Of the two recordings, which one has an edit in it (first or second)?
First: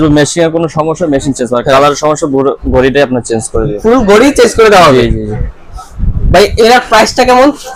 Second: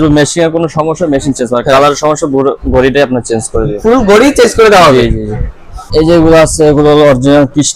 second